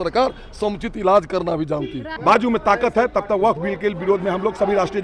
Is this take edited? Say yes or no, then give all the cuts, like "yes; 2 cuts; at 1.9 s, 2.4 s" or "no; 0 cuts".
yes; 1 cut; at 2.0 s